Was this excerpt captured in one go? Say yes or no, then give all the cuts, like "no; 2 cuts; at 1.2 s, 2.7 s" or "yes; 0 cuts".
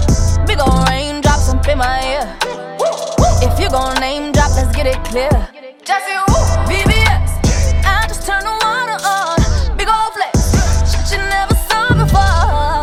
yes; 0 cuts